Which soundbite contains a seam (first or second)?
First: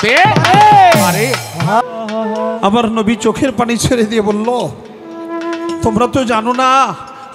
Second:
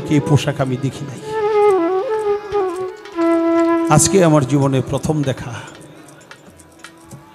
first